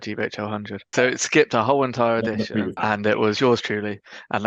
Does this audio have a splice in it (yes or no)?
yes